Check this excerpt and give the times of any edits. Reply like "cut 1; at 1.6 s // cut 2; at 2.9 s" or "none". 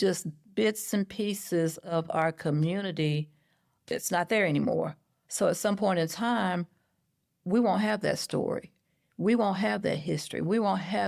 cut 1; at 3.8 s

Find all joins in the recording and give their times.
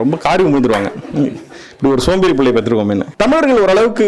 cut 1; at 3.1 s

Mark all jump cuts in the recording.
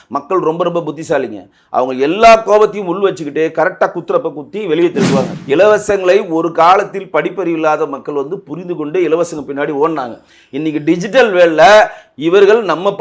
cut 1; at 5.3 s

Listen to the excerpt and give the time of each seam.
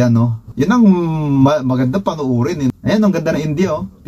cut 1; at 2.7 s

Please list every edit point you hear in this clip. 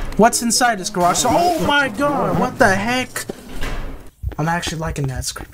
cut 1; at 4.0 s

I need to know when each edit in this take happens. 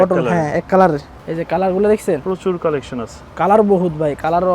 cut 1; at 1.2 s

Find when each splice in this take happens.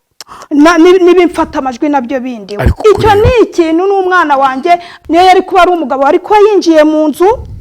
cut 1; at 4.9 s

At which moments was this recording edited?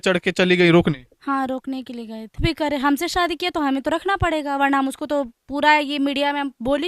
cut 1; at 2.4 s

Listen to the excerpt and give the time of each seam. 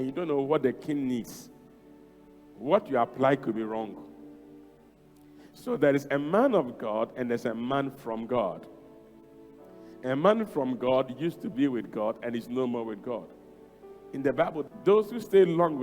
cut 1; at 14.7 s

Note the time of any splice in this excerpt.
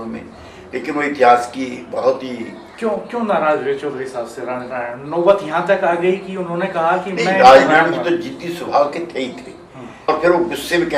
cut 1; at 10.1 s

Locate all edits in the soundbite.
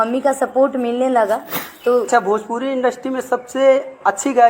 cut 1; at 2.1 s

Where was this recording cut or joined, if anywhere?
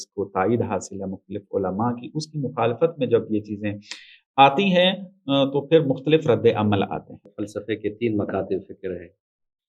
cut 1; at 7.3 s

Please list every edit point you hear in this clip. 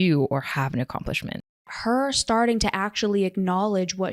cut 1; at 1.6 s

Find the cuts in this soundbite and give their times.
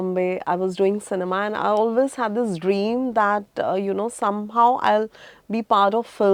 none

